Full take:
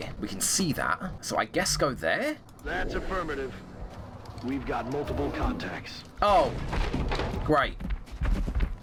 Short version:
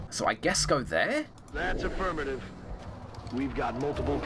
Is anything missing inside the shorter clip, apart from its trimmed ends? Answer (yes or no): no